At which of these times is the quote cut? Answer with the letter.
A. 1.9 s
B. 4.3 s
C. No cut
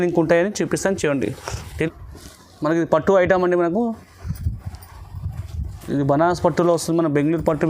A